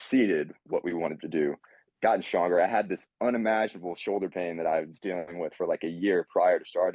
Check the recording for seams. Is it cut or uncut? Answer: uncut